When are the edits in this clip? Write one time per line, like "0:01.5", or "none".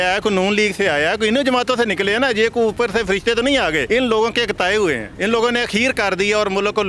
0:03.8